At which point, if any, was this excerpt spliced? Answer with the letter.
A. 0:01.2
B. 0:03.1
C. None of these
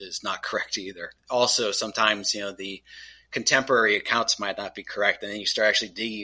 A